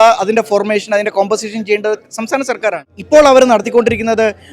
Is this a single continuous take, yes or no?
no